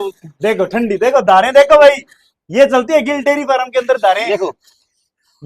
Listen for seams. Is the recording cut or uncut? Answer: uncut